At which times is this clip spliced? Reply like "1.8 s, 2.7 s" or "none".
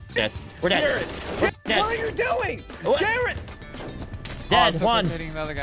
3.5 s